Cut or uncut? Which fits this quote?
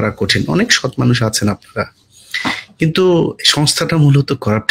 uncut